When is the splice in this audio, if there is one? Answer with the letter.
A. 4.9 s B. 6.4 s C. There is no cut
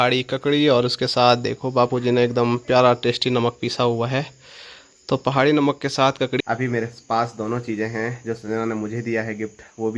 B